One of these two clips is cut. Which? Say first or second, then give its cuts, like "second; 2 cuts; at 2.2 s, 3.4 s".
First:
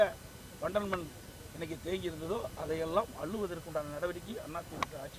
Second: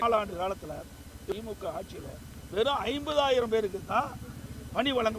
second; 1 cut; at 1.3 s